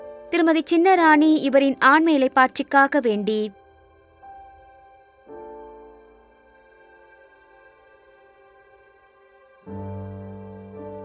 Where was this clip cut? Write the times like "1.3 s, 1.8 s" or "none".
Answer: 3.5 s